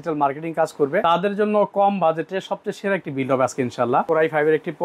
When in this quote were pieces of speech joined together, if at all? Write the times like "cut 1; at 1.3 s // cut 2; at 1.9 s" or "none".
cut 1; at 1.0 s // cut 2; at 4.1 s